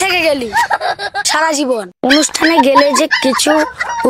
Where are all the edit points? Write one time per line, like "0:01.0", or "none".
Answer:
0:01.9